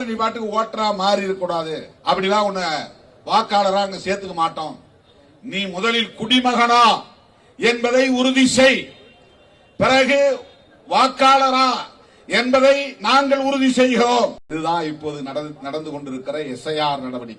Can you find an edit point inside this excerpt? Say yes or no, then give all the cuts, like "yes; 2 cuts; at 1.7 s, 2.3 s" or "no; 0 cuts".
yes; 2 cuts; at 1.9 s, 14.4 s